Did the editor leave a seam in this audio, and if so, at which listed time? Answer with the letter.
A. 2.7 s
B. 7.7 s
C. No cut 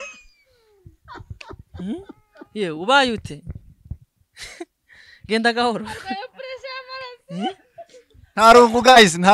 C